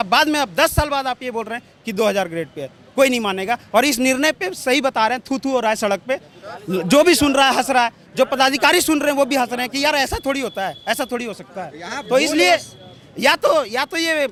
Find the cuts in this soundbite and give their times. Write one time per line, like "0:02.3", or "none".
none

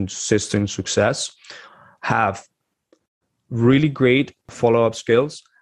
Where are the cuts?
0:04.5

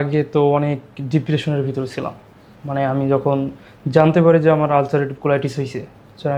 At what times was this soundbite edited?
none

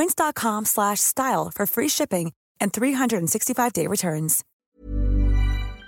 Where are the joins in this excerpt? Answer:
0:04.4

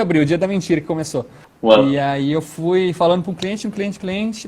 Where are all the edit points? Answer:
0:01.3

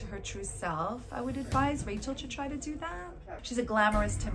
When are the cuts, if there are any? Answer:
0:03.3

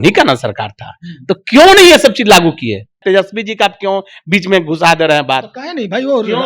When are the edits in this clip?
0:03.0

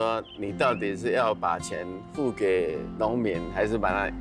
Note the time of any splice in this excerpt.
none

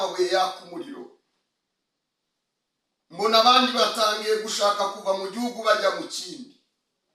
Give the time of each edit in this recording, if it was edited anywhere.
none

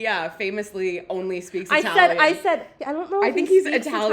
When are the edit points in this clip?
0:02.8

